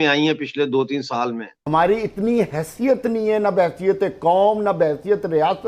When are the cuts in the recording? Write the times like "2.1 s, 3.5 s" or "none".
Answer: 1.5 s